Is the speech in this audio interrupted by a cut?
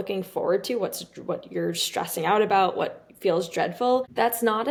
no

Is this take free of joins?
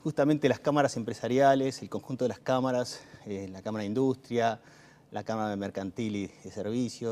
no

